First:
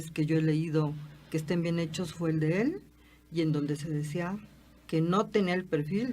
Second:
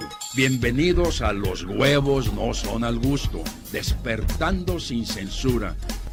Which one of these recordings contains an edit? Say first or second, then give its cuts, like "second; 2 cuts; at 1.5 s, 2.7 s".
first; 1 cut; at 3.8 s